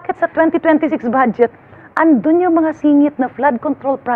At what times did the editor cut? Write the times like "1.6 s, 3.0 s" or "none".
none

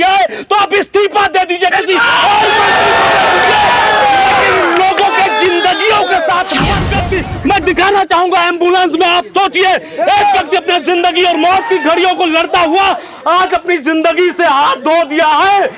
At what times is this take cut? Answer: 6.9 s

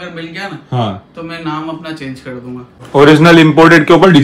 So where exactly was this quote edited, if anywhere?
2.8 s

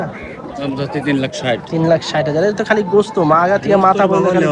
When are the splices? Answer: none

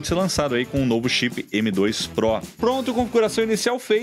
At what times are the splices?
2.6 s

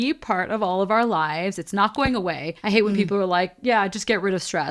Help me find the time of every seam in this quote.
none

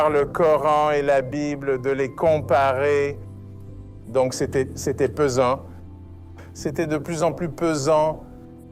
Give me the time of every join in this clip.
none

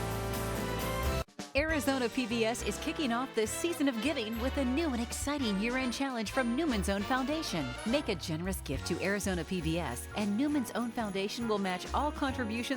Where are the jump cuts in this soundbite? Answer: 1.3 s

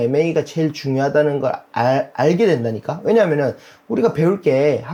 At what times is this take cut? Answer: none

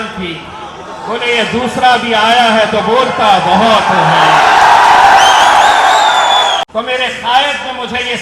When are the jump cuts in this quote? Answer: 6.6 s

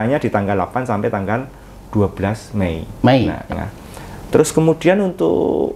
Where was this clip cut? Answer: 3.5 s

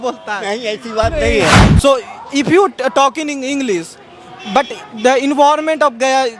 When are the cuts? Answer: 1.7 s

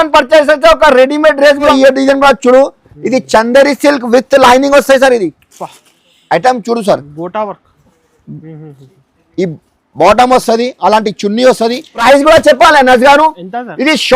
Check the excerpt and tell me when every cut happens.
1.7 s, 12.0 s

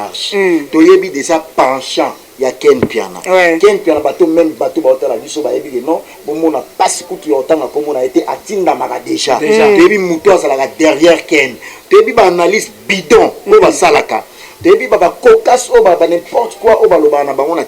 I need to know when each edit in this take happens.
none

